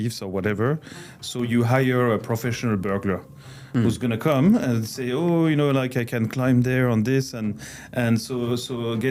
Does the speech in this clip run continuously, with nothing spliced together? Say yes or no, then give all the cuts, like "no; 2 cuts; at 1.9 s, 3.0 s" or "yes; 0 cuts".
yes; 0 cuts